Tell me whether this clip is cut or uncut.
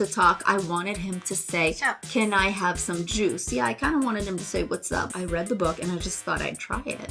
cut